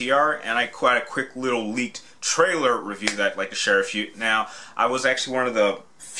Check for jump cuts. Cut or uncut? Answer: uncut